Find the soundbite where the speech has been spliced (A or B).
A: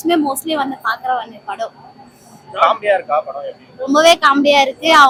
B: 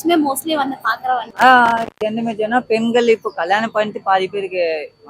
B